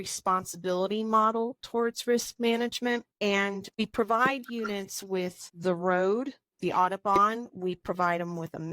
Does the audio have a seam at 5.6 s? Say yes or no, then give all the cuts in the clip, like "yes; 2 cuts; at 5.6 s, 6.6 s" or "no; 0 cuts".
yes; 2 cuts; at 3.6 s, 5.6 s